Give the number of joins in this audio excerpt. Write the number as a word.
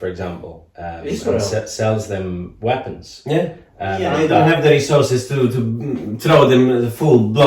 one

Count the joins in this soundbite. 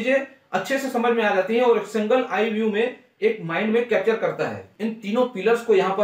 one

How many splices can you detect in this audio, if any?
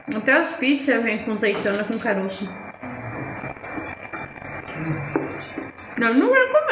zero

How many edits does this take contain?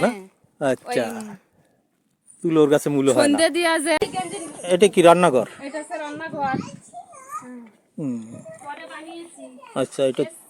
one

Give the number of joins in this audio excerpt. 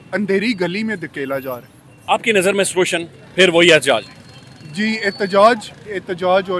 zero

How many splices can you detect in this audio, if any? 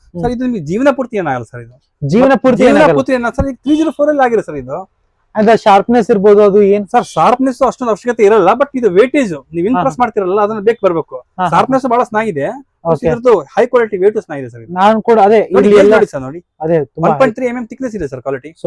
zero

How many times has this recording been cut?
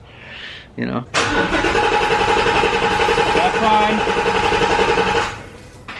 one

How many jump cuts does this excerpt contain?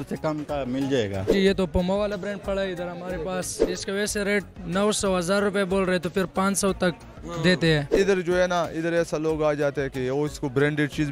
three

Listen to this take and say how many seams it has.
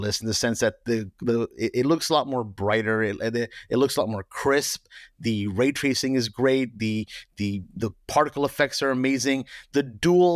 zero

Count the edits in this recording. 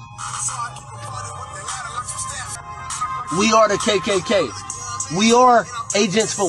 one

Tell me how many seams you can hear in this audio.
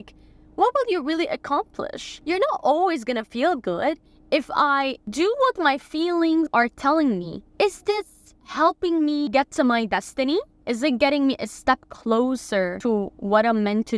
seven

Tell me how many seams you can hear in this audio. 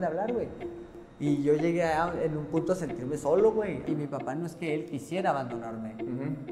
one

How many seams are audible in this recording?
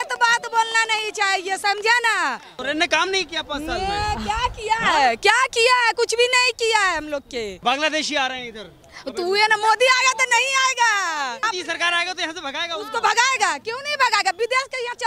three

